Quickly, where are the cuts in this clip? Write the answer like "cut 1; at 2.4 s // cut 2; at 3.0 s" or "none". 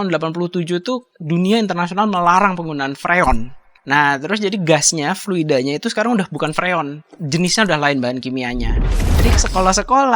cut 1; at 1.1 s // cut 2; at 8.9 s